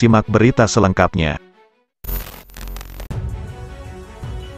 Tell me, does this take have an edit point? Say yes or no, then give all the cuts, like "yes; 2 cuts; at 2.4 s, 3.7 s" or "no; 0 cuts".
yes; 1 cut; at 3.1 s